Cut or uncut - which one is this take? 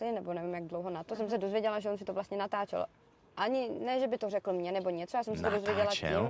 uncut